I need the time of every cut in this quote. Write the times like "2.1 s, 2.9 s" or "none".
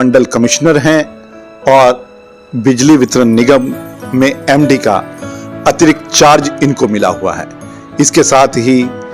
none